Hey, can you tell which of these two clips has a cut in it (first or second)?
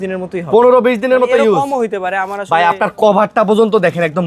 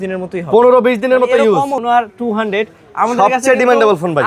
second